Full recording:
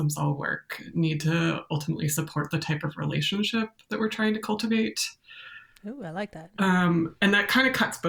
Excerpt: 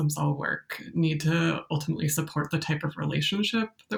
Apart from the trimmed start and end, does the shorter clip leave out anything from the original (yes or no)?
no